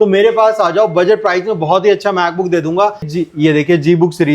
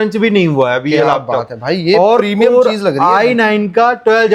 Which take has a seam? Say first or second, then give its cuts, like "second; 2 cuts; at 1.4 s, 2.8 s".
first; 1 cut; at 3.1 s